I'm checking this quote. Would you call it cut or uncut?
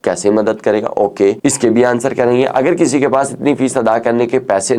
uncut